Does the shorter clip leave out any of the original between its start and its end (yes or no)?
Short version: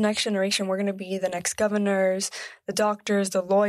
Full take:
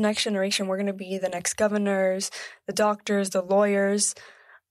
no